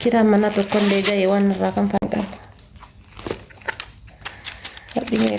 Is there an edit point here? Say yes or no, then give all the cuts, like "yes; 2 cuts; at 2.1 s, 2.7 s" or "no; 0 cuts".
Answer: yes; 1 cut; at 2.0 s